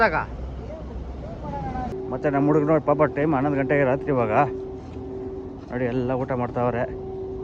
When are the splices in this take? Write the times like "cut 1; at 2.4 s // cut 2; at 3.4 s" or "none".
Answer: cut 1; at 1.9 s